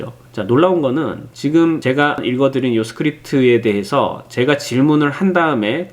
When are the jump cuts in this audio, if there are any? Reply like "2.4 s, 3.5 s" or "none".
2.1 s